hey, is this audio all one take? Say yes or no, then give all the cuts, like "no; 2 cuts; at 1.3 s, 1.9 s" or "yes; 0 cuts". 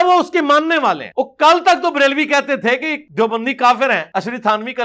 no; 3 cuts; at 1.0 s, 3.0 s, 4.0 s